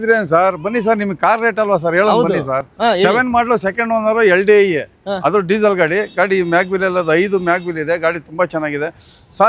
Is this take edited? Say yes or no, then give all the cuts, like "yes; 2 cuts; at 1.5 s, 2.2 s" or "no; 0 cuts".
no; 0 cuts